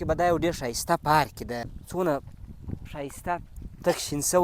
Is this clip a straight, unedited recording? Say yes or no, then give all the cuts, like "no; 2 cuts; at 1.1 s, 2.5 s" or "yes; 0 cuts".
no; 1 cut; at 1.7 s